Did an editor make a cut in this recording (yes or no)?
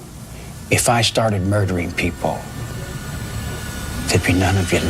no